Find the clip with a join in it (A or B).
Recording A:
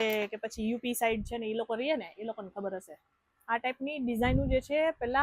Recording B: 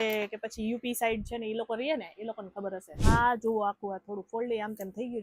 B